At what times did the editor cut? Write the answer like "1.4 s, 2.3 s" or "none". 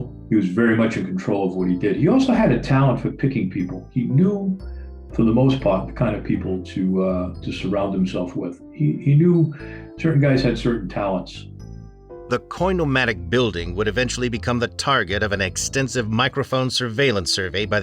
none